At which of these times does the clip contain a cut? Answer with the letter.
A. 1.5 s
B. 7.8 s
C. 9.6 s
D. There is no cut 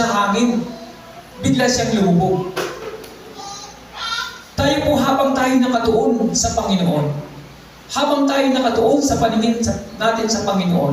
D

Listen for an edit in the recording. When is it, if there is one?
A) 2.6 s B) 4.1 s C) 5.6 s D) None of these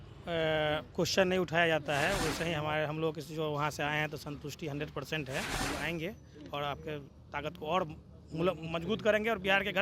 C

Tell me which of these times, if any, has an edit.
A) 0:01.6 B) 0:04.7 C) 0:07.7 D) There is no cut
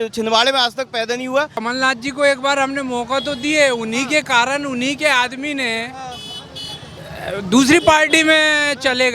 A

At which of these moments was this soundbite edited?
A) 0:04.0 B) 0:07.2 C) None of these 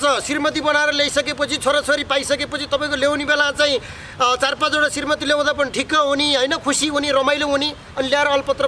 C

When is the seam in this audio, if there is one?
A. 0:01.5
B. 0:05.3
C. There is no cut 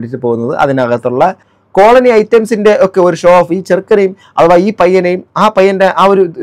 A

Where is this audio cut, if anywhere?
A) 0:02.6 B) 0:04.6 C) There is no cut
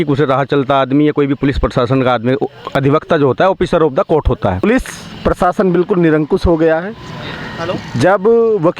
B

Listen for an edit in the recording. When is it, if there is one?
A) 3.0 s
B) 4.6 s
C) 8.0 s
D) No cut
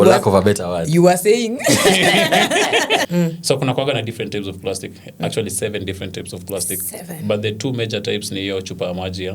A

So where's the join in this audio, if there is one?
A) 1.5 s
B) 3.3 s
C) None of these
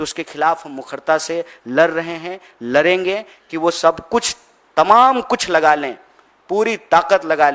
B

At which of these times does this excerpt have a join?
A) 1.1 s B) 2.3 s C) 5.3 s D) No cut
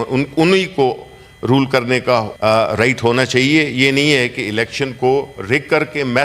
B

